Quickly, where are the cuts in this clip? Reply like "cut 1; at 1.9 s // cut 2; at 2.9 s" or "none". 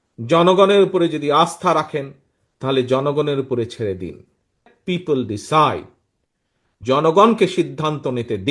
cut 1; at 4.6 s